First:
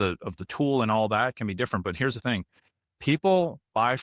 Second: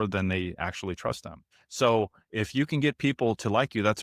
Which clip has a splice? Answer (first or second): second